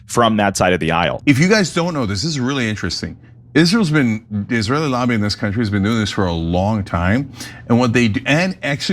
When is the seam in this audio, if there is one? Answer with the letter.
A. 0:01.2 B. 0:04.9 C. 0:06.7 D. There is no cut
A